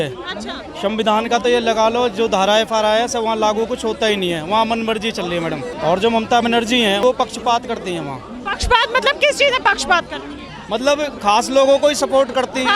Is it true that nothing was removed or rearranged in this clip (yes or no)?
no